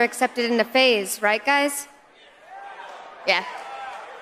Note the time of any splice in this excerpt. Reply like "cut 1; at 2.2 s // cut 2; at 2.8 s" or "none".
none